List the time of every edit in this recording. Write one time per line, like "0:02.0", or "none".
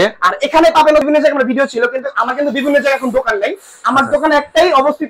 0:01.0

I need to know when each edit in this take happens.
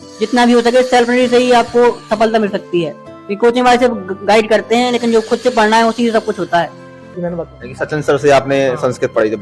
0:07.1

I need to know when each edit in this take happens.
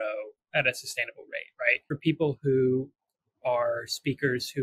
0:01.9

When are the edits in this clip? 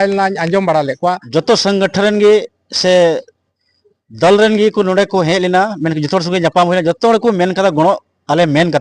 0:01.2

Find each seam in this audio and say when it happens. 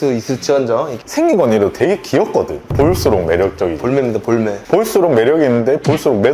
0:01.0
0:04.6

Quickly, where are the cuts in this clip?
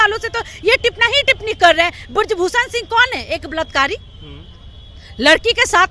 none

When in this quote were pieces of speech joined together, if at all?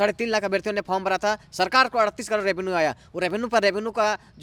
none

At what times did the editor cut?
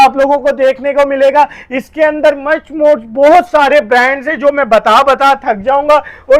none

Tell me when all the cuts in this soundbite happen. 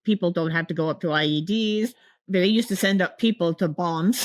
0:02.2

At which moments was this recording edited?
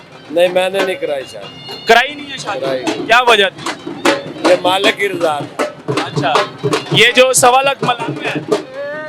none

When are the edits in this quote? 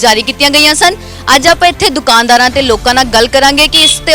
none

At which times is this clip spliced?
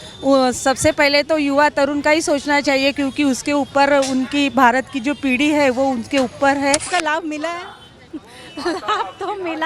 0:06.9

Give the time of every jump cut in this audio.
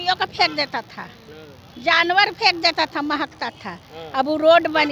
none

